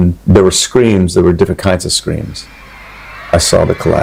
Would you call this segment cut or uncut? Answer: uncut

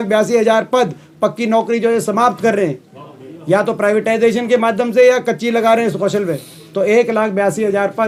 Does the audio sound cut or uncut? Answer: uncut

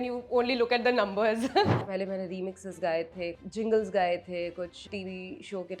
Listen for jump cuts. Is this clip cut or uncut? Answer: cut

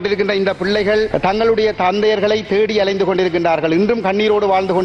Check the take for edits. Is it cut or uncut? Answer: cut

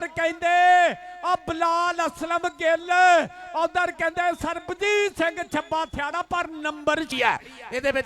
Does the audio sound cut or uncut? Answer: cut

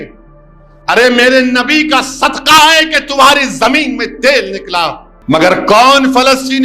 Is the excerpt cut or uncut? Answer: cut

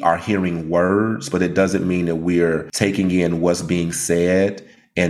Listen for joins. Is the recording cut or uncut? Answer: cut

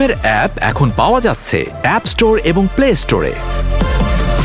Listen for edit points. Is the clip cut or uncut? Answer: uncut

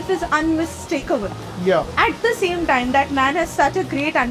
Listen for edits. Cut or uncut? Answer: uncut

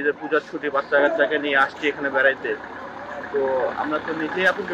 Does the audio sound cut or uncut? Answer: uncut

